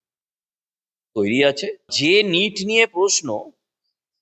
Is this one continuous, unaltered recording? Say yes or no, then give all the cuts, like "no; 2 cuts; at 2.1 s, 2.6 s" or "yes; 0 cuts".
no; 1 cut; at 1.9 s